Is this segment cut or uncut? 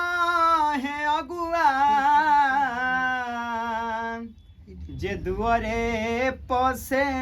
uncut